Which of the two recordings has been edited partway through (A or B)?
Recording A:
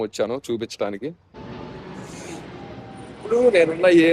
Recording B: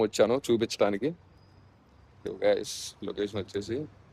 A